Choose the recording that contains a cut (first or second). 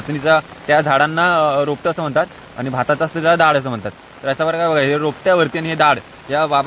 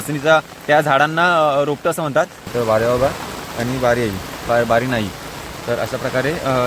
second